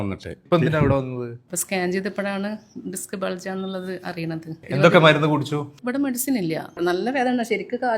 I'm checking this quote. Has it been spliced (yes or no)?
yes